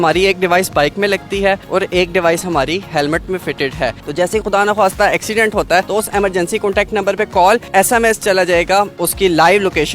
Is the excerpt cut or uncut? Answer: cut